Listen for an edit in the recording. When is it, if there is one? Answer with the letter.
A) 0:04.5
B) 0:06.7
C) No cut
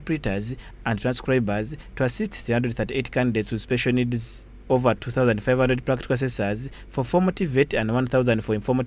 A